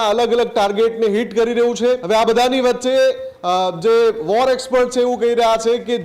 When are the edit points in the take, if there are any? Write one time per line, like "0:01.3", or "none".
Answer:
0:02.0